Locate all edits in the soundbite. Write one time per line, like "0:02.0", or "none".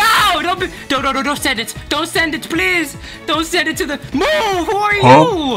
none